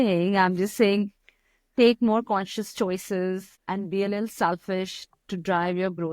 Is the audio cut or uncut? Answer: cut